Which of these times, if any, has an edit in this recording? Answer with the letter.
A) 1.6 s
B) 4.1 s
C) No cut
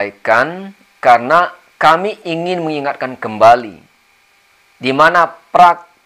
C